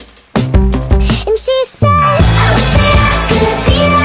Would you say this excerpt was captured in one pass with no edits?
yes; 0 cuts

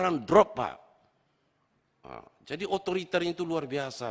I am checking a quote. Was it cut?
no; 0 cuts

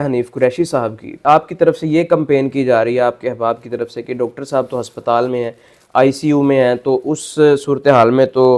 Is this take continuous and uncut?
no; 1 cut; at 1.2 s

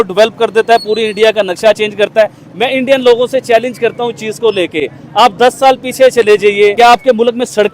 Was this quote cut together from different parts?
yes; 1 cut; at 6.7 s

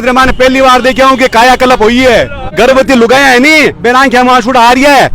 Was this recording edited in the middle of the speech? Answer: yes; 1 cut; at 2.5 s

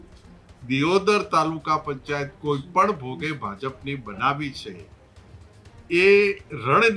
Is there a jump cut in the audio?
no; 0 cuts

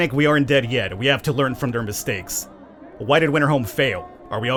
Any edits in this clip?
no; 0 cuts

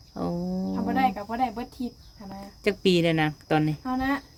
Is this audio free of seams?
yes; 0 cuts

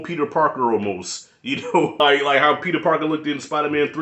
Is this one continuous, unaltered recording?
no; 1 cut; at 2.0 s

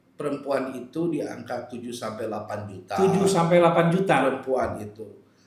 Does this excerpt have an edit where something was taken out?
no; 0 cuts

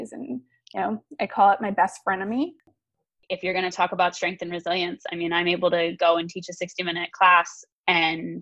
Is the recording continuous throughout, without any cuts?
no; 1 cut; at 2.6 s

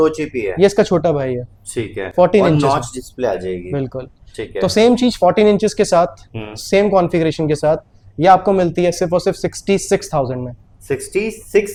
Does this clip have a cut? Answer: no; 0 cuts

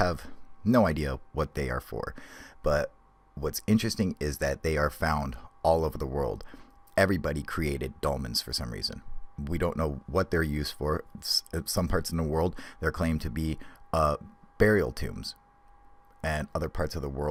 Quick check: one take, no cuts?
yes; 0 cuts

